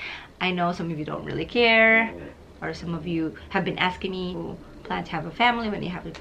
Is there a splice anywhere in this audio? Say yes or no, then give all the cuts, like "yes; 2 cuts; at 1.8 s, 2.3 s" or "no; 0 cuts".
yes; 1 cut; at 4.4 s